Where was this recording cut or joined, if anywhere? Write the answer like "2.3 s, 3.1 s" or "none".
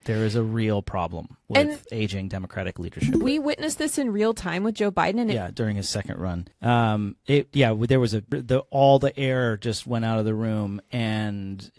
3.2 s, 5.3 s, 6.5 s, 8.3 s